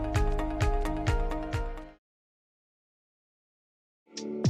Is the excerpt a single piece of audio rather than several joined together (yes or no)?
yes